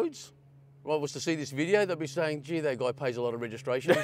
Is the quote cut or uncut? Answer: uncut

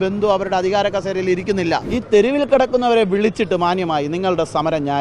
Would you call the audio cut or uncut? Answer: cut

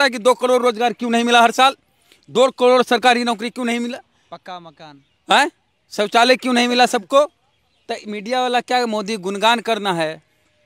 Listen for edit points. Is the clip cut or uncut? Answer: uncut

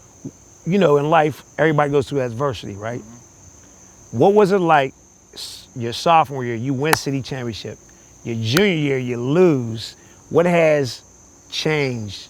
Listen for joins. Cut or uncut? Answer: uncut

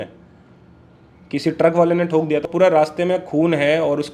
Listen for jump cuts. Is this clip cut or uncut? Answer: cut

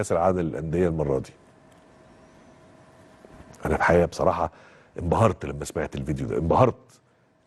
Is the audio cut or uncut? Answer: uncut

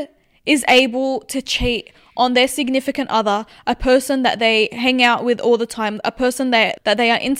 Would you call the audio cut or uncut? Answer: uncut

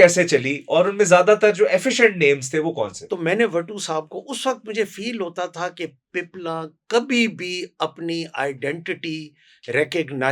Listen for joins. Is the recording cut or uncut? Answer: cut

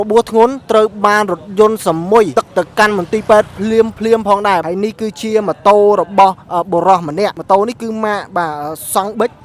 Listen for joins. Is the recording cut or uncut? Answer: cut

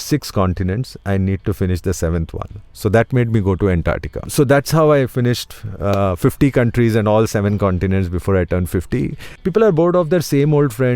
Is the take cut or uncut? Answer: cut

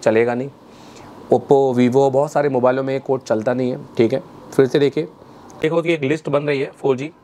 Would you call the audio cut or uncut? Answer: cut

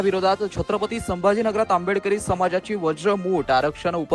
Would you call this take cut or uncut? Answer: uncut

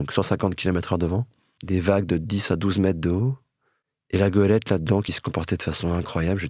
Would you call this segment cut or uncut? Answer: uncut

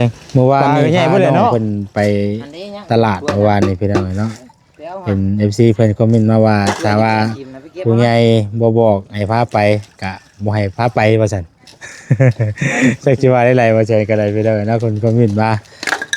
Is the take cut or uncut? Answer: cut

